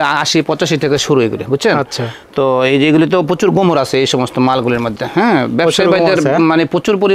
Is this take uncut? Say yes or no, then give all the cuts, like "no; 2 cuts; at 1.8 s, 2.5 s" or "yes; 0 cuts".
yes; 0 cuts